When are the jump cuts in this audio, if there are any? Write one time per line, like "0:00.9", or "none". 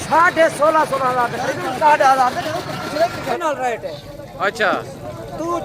0:03.3